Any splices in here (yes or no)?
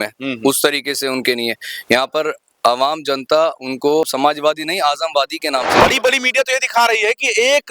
yes